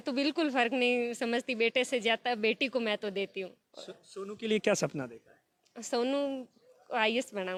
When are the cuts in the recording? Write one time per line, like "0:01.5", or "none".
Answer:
none